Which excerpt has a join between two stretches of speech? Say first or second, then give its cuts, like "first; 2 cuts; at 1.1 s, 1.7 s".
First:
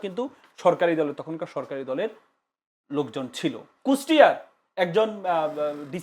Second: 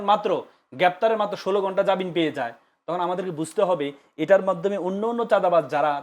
first; 1 cut; at 3.7 s